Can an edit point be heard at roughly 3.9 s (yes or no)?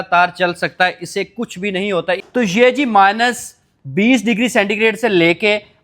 no